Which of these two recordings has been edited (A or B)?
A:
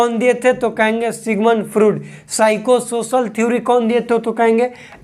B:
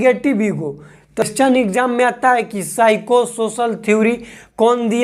B